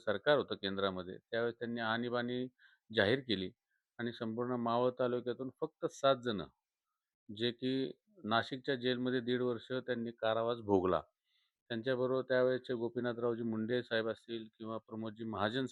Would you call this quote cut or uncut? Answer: uncut